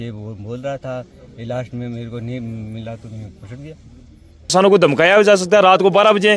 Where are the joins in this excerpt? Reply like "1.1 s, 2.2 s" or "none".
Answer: 4.5 s